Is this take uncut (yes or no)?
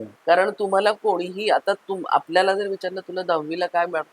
yes